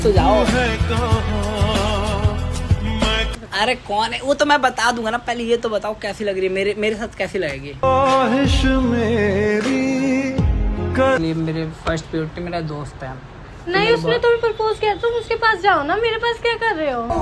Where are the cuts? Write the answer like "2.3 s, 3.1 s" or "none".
3.3 s, 11.2 s